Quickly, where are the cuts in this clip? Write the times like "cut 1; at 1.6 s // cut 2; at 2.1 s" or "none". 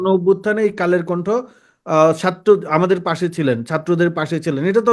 none